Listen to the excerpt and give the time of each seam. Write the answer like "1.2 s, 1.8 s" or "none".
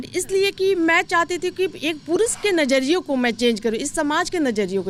none